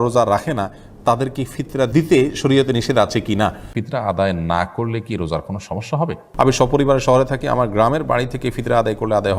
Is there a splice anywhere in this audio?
yes; 3 cuts; at 1.9 s, 3.7 s, 6.2 s

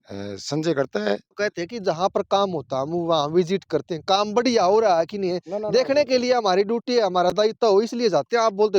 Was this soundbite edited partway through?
yes; 1 cut; at 1.3 s

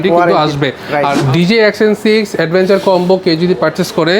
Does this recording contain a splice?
yes; 1 cut; at 1.2 s

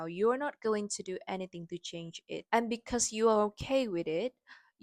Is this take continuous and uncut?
no; 1 cut; at 2.4 s

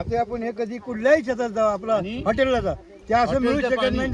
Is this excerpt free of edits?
yes; 0 cuts

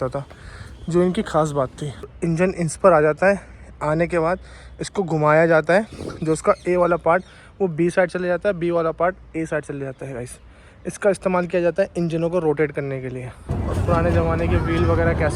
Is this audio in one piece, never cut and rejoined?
no; 2 cuts; at 2.1 s, 13.4 s

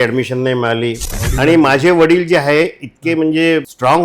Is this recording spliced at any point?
yes; 1 cut; at 1.1 s

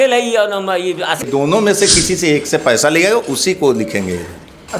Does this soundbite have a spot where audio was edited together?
yes; 1 cut; at 1.2 s

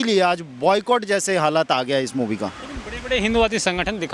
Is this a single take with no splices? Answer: yes; 0 cuts

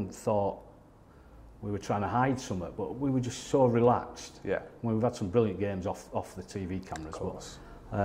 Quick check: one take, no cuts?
yes; 0 cuts

